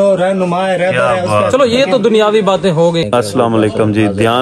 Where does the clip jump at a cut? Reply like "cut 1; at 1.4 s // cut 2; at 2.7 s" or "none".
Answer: cut 1; at 3.1 s